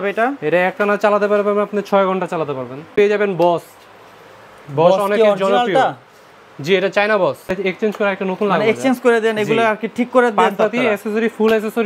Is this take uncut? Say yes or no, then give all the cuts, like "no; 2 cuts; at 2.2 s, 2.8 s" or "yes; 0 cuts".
no; 2 cuts; at 2.9 s, 7.5 s